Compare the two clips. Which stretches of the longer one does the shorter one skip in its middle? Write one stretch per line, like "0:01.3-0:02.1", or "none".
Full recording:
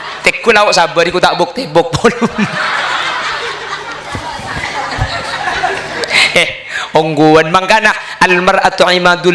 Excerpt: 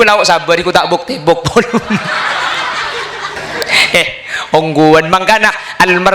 0:03.9-0:05.8